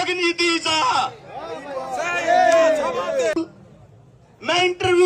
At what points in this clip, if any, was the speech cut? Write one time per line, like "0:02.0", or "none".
0:03.4